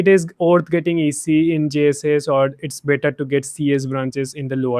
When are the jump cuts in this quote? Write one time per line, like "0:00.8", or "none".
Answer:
none